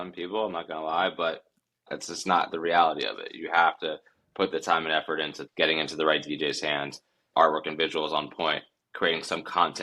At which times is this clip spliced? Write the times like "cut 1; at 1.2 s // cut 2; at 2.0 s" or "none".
cut 1; at 5.4 s // cut 2; at 7.3 s